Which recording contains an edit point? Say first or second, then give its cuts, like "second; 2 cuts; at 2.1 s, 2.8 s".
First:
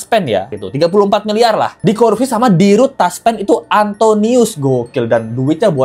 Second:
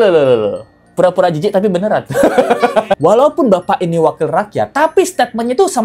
second; 1 cut; at 3.0 s